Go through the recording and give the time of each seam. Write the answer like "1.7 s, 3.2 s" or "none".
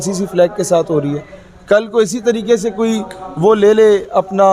none